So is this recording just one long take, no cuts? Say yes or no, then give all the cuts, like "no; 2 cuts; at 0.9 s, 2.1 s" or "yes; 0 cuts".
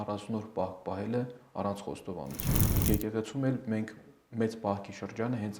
no; 1 cut; at 2.7 s